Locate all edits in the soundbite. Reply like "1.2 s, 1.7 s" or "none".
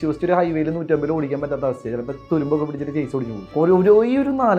3.4 s